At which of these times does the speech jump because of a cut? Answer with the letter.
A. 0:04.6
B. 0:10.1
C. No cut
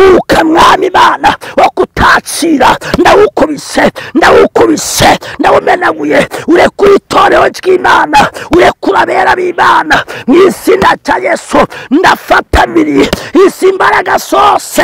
C